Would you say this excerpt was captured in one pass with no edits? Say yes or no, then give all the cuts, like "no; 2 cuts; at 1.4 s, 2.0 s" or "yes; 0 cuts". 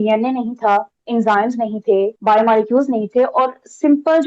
no; 2 cuts; at 1.0 s, 2.2 s